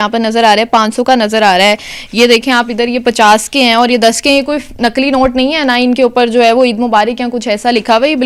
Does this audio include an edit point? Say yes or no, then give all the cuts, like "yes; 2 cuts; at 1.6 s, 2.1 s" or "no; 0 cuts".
no; 0 cuts